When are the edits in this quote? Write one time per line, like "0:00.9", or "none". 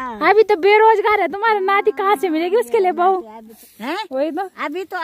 0:03.7